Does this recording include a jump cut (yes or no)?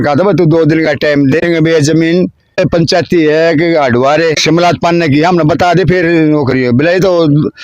yes